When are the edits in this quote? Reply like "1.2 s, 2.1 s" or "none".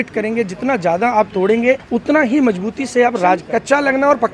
1.8 s, 3.4 s